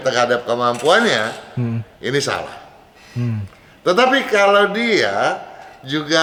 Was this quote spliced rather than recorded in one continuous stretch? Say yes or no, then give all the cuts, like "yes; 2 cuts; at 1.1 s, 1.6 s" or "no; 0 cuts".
no; 0 cuts